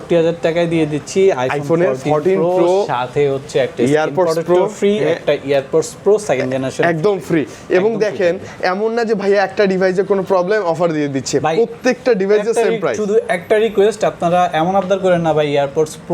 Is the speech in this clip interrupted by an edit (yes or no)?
no